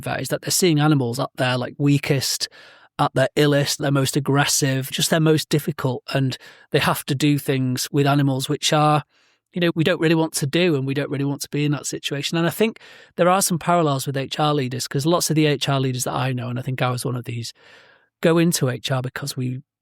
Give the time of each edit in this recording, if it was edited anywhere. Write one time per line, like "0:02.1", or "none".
0:02.9
0:03.8
0:04.9
0:07.9
0:09.7